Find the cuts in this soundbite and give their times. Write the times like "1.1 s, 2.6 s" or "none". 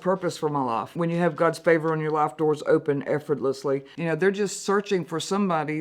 0.9 s, 3.9 s

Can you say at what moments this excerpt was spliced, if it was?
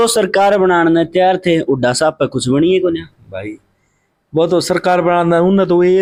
none

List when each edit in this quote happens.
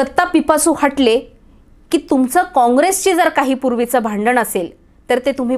none

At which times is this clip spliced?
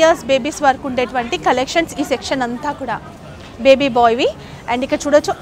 none

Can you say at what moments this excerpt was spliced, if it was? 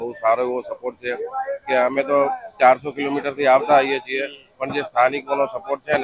none

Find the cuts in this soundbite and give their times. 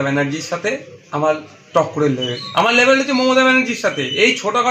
2.4 s

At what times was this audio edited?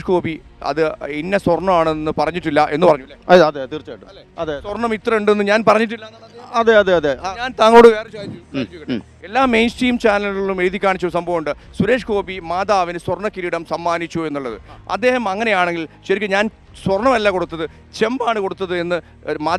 none

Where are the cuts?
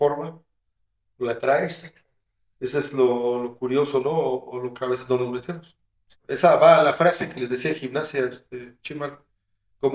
6.2 s

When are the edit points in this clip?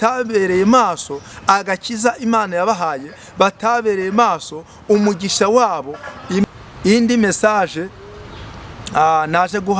6.4 s

